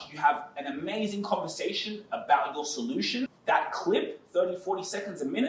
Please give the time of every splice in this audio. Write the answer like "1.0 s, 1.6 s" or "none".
3.3 s